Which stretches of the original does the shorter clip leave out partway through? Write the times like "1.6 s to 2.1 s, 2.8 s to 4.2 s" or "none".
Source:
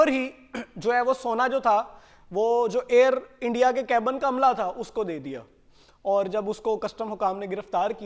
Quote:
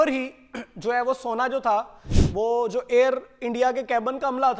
none

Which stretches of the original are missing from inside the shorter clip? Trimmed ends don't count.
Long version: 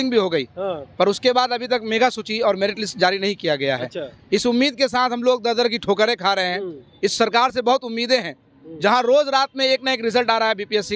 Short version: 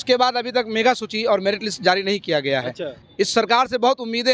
4.1 s to 6.8 s

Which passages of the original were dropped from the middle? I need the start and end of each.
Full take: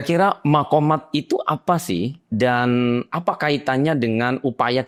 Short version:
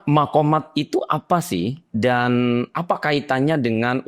none

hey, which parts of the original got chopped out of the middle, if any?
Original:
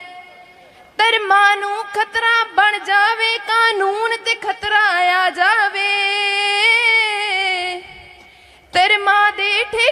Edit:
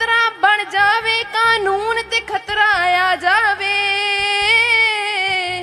none

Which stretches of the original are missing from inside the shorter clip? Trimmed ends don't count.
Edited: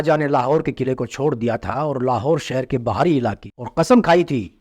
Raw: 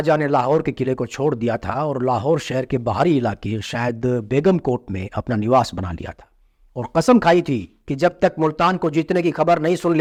3.5 s to 6.7 s

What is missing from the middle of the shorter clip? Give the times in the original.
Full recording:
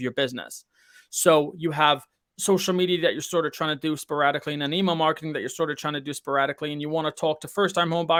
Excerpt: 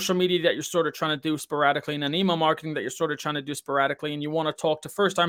none

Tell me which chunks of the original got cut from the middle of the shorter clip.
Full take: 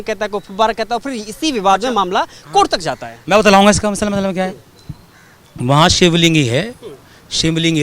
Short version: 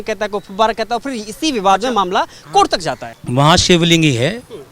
3.1 s to 5.4 s

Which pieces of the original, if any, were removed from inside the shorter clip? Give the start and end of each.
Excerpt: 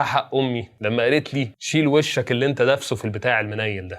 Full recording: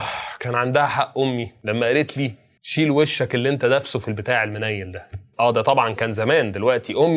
2.4 s to 2.6 s

